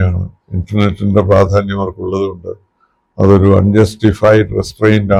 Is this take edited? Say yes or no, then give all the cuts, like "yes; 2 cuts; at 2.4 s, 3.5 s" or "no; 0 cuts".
no; 0 cuts